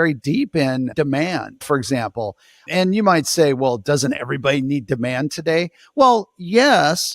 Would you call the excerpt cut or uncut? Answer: cut